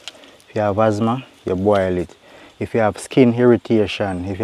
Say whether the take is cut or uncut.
uncut